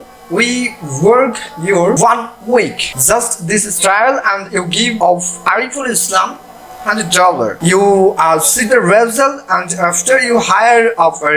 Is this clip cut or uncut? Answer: cut